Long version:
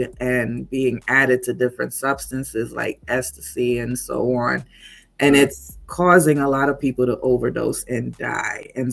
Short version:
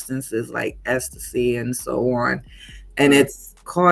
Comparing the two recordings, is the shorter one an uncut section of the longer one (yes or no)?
yes